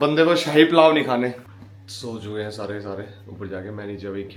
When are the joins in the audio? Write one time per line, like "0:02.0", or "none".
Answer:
none